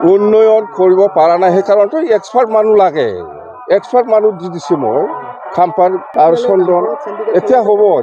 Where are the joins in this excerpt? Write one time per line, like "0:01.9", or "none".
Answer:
0:06.1